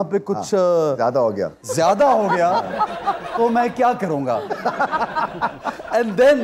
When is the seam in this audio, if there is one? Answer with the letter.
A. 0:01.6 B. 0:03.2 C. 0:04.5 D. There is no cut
D